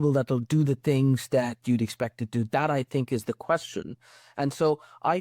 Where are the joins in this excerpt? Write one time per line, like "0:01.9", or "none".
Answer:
none